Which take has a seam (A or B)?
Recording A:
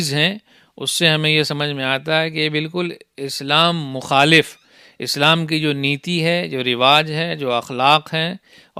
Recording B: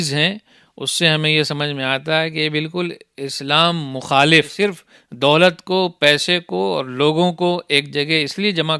B